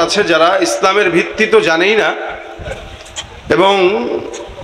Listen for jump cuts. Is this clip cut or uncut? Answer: uncut